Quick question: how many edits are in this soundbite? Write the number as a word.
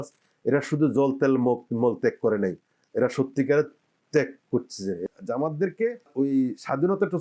two